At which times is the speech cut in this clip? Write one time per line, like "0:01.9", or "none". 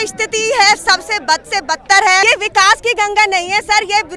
0:02.2

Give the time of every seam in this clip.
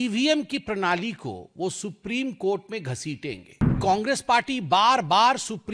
0:03.6

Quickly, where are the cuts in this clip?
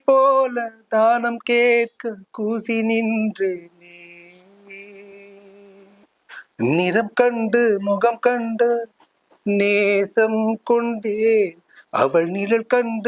0:06.1

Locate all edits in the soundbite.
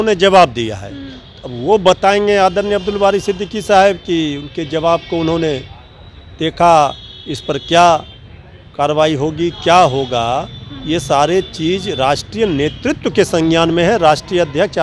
none

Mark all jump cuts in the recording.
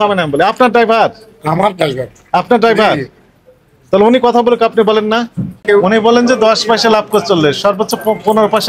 0:05.6

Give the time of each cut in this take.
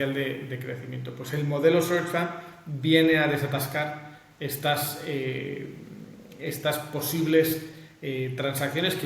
none

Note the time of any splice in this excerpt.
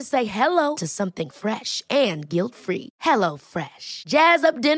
none

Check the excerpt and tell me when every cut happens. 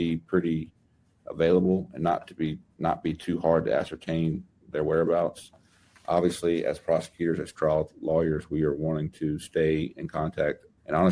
none

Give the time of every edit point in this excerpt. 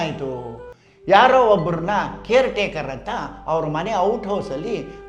none

